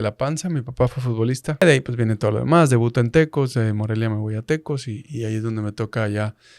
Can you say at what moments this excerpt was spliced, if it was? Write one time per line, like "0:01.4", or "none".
0:01.6